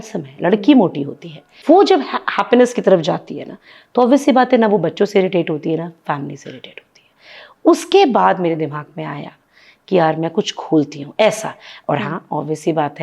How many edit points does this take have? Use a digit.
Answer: 1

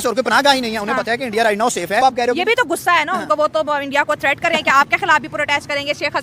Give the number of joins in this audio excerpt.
1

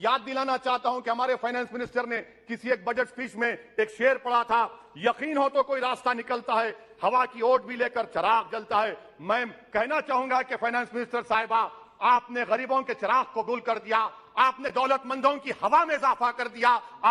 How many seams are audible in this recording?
0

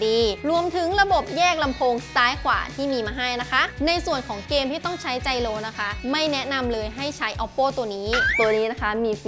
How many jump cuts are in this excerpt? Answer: 2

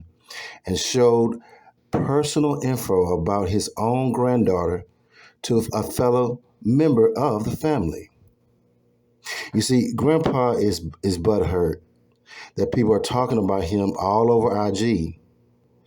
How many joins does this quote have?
1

